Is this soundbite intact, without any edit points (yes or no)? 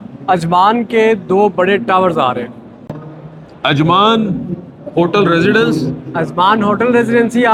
yes